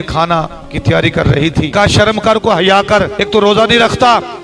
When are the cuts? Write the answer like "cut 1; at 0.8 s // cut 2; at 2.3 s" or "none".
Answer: cut 1; at 1.7 s // cut 2; at 3.2 s